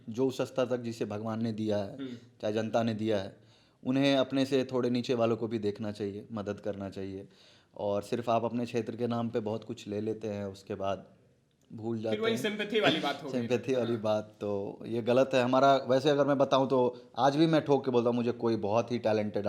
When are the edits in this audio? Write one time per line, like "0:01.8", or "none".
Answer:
none

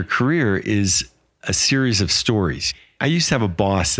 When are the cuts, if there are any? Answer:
0:02.7

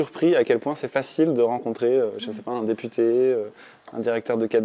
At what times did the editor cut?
none

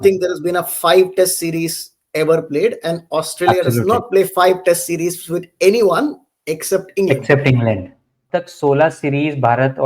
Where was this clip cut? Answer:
0:08.2

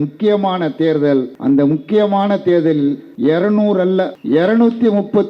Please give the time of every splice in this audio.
0:01.3
0:03.1
0:04.1

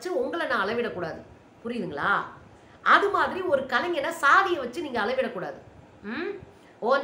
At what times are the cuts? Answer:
none

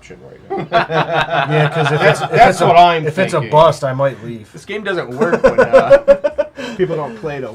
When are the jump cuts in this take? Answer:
none

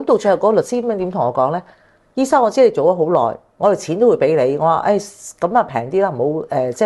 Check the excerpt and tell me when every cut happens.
none

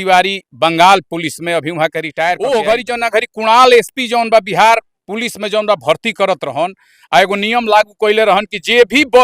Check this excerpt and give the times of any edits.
0:02.4

